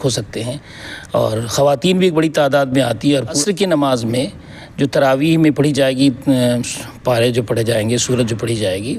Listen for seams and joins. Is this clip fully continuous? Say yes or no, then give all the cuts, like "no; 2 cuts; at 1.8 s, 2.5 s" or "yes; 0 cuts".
no; 1 cut; at 3.4 s